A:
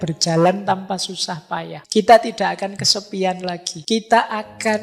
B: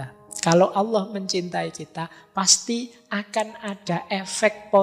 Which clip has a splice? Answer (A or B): A